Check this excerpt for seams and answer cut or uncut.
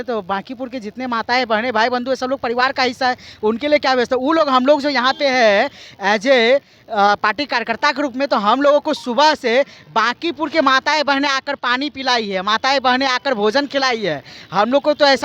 uncut